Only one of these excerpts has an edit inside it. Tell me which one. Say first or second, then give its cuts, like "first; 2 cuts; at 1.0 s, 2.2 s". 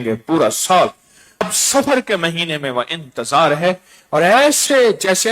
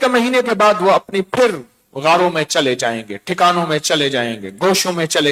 first; 1 cut; at 1.4 s